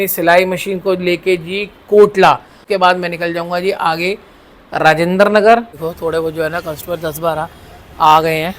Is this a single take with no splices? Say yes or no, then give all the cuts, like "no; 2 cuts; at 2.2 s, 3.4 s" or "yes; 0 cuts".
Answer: no; 2 cuts; at 2.6 s, 5.7 s